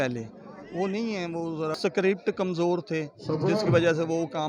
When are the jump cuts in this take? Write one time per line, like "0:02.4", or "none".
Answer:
0:01.8